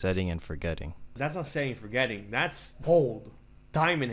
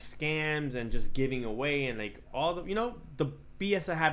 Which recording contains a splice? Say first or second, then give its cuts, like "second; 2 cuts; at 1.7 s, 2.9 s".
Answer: first; 2 cuts; at 1.2 s, 2.7 s